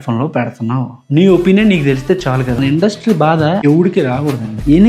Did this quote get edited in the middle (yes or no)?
yes